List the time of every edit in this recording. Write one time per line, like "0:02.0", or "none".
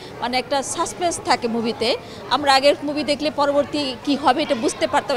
none